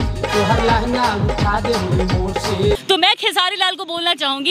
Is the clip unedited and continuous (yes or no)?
no